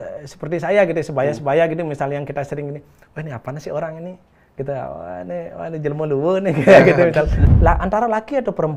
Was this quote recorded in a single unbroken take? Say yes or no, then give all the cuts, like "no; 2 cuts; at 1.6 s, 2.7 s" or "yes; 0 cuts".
no; 1 cut; at 7.4 s